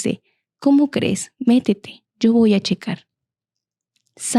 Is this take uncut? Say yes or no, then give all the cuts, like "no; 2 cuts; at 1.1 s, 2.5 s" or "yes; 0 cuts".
yes; 0 cuts